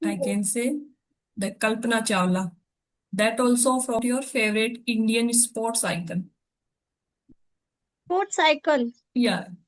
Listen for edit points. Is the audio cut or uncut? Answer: cut